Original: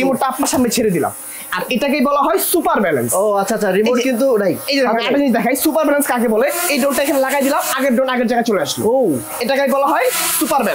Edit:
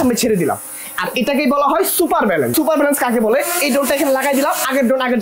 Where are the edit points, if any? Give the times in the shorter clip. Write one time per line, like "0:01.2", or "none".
0:02.5